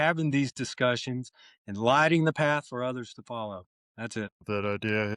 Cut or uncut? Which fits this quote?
cut